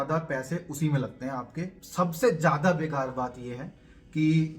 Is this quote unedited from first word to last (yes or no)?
no